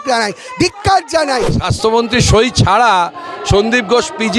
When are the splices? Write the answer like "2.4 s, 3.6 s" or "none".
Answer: 1.6 s